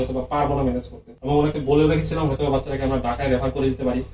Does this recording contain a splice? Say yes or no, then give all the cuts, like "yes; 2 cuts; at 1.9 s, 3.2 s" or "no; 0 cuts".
no; 0 cuts